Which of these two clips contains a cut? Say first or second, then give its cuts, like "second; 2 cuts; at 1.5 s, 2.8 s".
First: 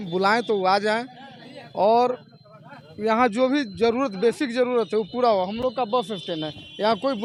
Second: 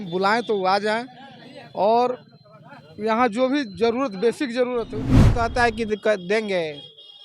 second; 1 cut; at 5.2 s